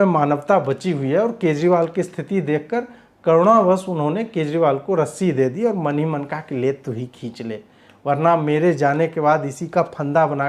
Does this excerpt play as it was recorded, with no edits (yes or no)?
yes